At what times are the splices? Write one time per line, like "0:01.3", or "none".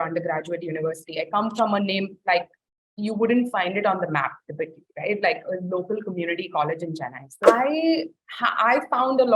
0:07.4